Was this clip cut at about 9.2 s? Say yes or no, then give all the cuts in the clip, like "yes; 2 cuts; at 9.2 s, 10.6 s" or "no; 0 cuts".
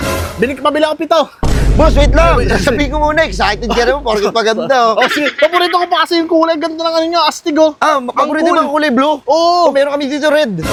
no; 0 cuts